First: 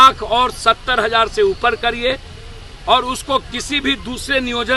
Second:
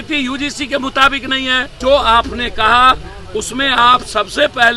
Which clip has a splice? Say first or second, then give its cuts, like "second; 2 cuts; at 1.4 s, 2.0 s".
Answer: second; 1 cut; at 1.7 s